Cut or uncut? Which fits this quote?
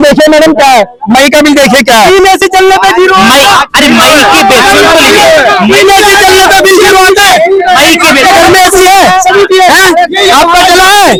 uncut